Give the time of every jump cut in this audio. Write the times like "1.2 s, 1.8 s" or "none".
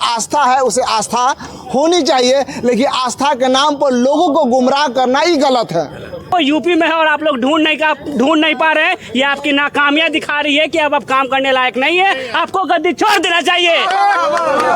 6.2 s